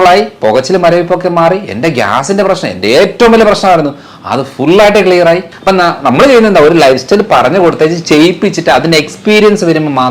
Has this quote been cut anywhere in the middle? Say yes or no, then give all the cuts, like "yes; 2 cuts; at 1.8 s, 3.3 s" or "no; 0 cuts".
yes; 1 cut; at 5.5 s